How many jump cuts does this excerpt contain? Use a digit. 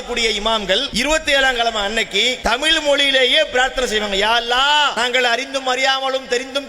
3